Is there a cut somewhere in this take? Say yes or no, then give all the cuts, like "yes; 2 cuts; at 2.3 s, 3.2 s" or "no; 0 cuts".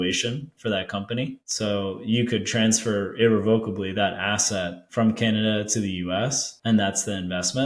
yes; 3 cuts; at 1.4 s, 4.8 s, 6.5 s